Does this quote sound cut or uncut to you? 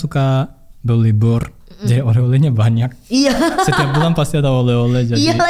uncut